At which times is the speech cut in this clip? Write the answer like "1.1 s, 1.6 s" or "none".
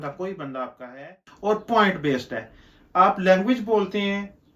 1.2 s